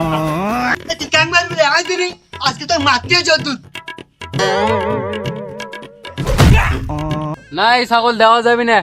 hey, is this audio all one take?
no; 2 cuts; at 0.8 s, 7.3 s

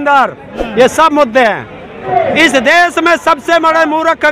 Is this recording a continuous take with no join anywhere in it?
no; 1 cut; at 2.1 s

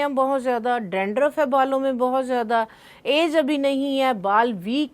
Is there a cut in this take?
no; 0 cuts

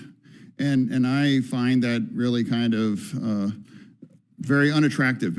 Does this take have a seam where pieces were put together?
no; 0 cuts

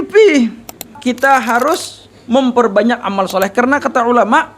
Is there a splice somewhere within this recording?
yes; 1 cut; at 1.0 s

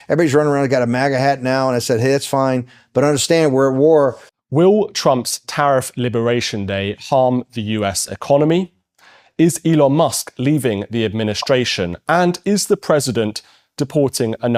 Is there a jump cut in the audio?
no; 0 cuts

